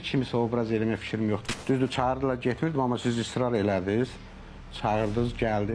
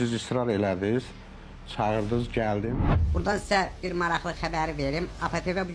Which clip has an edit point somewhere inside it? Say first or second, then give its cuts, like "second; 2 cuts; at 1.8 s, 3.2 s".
first; 1 cut; at 1.5 s